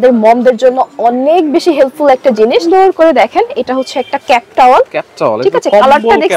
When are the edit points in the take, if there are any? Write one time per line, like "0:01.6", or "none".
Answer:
0:02.6